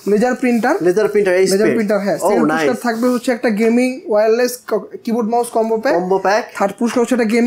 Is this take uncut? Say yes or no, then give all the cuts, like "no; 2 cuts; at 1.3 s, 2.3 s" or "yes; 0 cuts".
yes; 0 cuts